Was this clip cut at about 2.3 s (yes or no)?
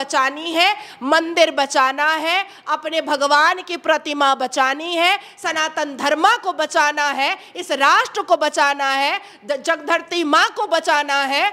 no